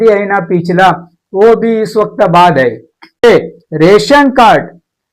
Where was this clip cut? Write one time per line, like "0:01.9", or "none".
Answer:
0:03.2

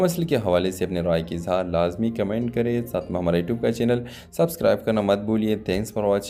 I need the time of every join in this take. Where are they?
none

